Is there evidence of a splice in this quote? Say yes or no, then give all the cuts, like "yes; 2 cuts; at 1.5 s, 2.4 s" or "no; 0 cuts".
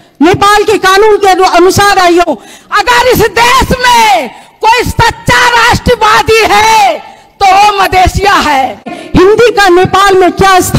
yes; 2 cuts; at 2.2 s, 9.0 s